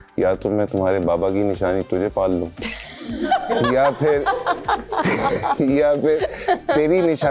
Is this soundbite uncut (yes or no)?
yes